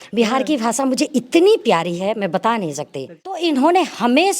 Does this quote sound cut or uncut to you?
cut